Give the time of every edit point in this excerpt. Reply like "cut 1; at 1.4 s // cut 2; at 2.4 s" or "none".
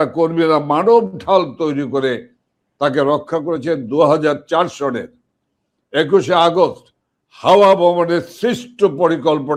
none